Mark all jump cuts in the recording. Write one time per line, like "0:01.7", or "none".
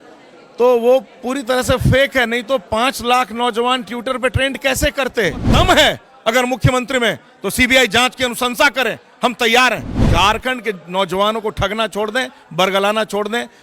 0:05.4
0:09.9